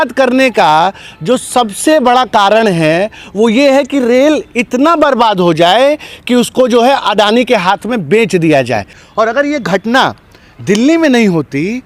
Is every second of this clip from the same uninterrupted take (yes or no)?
no